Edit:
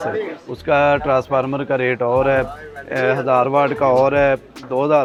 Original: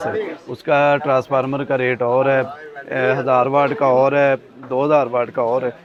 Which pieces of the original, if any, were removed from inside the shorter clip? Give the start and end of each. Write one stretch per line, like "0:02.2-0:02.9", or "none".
none